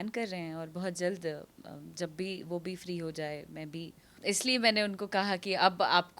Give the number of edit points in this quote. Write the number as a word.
one